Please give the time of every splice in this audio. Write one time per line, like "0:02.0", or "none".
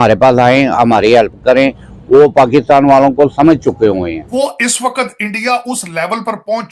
0:04.2